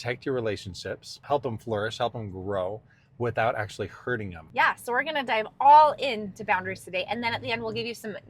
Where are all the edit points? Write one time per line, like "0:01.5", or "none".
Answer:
0:01.1
0:04.4